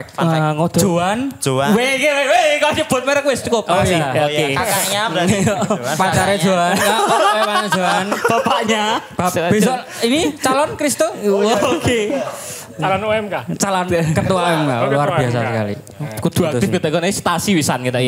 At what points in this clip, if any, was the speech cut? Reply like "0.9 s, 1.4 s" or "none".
none